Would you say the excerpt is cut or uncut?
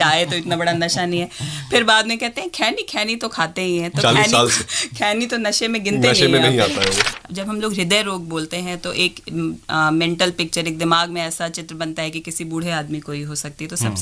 cut